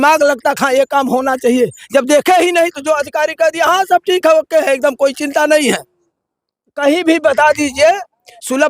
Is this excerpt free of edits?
no; 1 cut; at 6.7 s

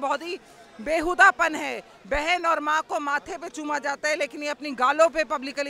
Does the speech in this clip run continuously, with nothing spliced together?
yes; 0 cuts

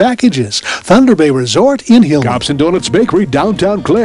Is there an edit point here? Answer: yes; 1 cut; at 2.4 s

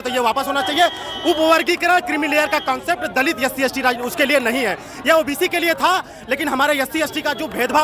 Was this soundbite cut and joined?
no; 0 cuts

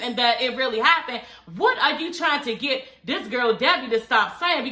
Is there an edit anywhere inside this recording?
no; 0 cuts

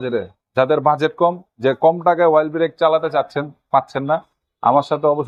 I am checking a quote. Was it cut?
no; 0 cuts

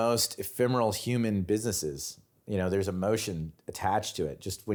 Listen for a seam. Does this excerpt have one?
no; 0 cuts

